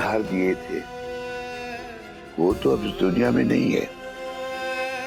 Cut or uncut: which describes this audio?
uncut